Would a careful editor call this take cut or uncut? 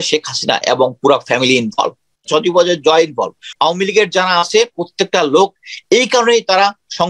cut